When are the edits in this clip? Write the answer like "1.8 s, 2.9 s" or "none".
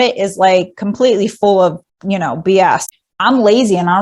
2.9 s

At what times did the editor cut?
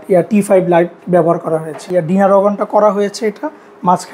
1.8 s

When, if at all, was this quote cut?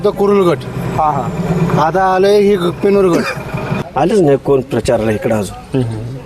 3.8 s

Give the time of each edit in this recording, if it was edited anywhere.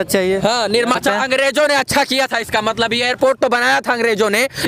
1.0 s

